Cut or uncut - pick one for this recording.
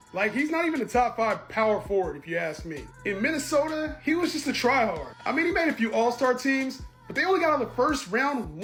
uncut